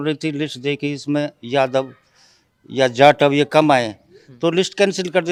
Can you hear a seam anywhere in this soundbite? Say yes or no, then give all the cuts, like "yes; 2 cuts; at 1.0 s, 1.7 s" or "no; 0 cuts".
no; 0 cuts